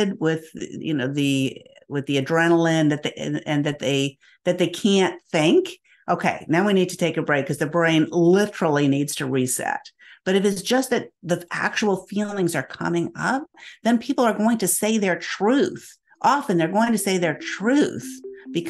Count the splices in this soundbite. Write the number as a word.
zero